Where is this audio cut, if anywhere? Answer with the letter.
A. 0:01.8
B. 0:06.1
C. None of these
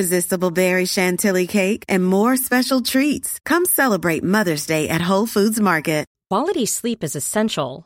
B